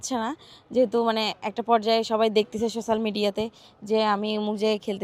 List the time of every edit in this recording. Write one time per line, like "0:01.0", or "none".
none